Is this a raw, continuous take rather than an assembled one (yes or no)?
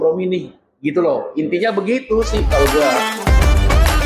no